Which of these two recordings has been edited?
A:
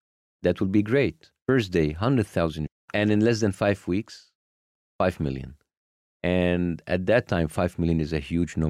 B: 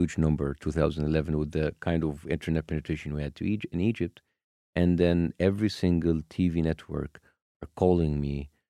A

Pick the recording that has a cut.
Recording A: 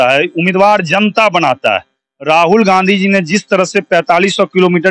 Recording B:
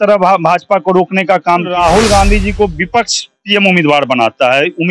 B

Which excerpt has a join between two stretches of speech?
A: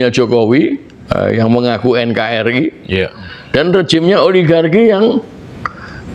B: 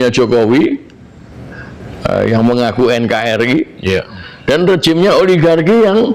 A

